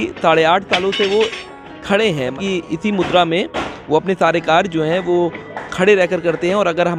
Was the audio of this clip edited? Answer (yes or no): yes